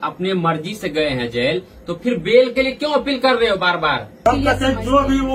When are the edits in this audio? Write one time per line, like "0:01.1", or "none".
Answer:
0:04.2